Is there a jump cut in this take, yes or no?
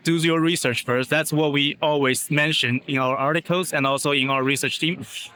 no